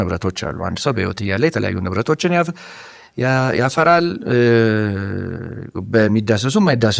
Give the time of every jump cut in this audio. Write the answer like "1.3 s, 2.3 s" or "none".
none